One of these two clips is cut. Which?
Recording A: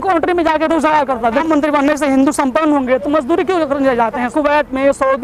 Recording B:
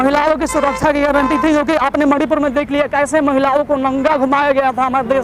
A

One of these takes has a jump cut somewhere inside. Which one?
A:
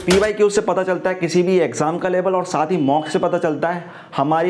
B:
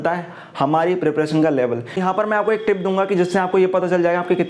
B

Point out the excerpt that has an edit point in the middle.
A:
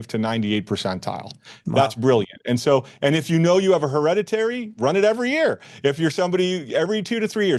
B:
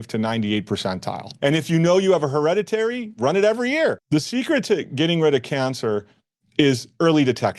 B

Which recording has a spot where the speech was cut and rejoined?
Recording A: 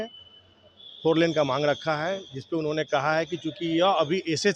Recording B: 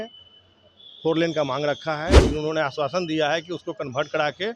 B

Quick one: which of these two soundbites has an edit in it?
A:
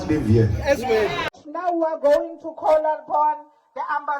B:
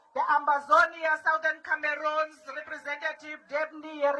A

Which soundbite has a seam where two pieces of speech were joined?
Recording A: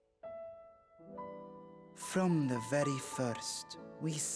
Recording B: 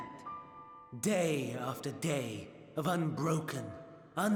A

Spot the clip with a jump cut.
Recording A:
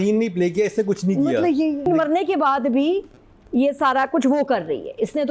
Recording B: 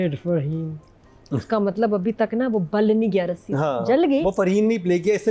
A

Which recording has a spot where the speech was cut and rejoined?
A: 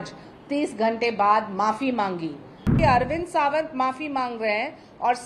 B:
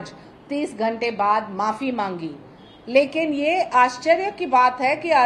A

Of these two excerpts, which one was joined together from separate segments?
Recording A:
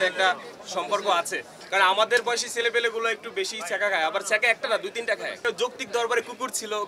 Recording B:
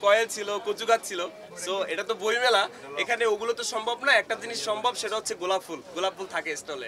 A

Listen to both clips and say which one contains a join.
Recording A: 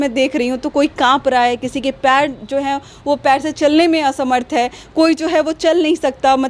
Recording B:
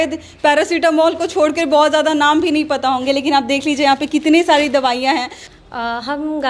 B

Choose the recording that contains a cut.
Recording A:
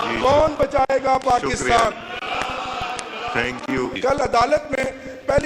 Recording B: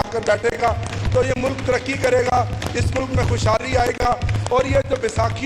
A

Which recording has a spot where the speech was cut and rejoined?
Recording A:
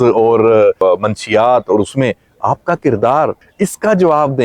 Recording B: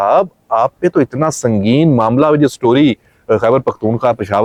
A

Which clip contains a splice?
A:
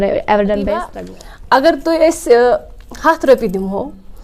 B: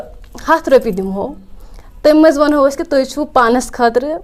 A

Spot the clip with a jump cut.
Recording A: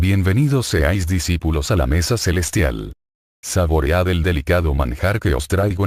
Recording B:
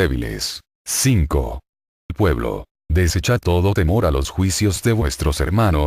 B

